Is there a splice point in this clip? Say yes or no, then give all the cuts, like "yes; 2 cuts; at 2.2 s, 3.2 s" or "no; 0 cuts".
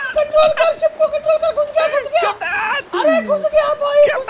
no; 0 cuts